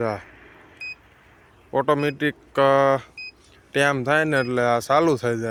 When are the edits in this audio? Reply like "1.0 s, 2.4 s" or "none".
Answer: none